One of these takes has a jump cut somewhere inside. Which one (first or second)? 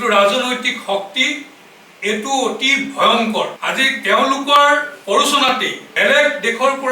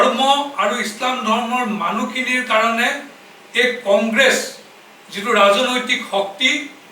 first